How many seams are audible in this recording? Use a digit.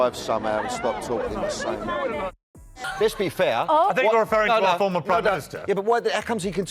1